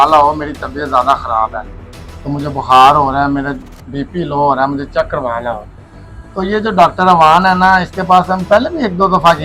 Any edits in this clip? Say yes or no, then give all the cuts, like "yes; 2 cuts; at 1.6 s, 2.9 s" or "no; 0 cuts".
no; 0 cuts